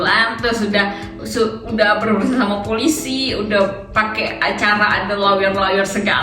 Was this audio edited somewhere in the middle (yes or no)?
no